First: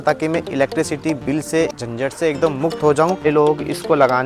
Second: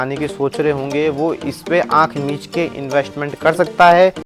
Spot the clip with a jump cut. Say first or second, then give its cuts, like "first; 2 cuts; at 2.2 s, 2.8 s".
first; 1 cut; at 3.3 s